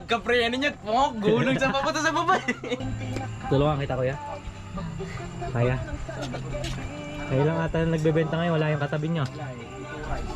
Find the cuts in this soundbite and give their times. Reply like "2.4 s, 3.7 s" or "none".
2.9 s